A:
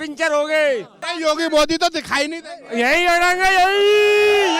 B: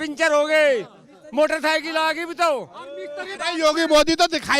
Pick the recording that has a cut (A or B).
A